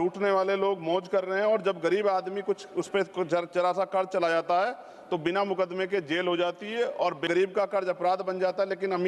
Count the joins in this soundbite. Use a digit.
1